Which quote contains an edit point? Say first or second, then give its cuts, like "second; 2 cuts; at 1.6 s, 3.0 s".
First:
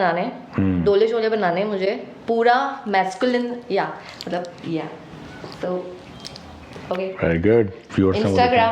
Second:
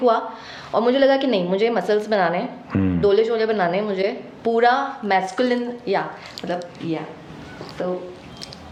first; 1 cut; at 7.8 s